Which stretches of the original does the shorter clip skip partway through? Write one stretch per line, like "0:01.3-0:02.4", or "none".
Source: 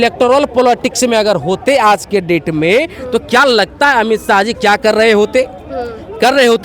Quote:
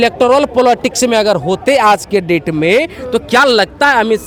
none